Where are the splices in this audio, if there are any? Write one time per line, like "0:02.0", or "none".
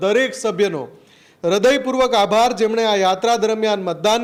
none